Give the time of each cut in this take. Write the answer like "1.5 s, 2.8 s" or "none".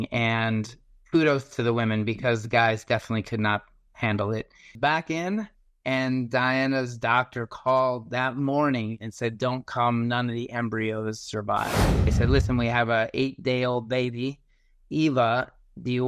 4.7 s, 12.1 s